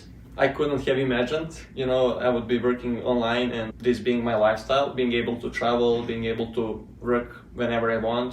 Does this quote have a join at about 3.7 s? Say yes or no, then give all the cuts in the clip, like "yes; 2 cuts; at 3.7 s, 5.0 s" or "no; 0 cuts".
yes; 1 cut; at 3.7 s